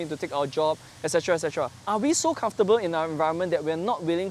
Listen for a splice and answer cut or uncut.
cut